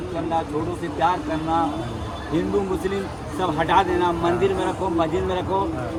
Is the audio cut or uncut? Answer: uncut